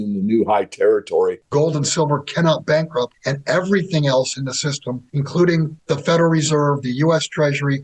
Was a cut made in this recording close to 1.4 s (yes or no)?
yes